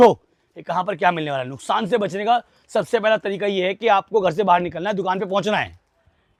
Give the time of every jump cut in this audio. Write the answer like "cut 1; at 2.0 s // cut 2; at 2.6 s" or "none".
none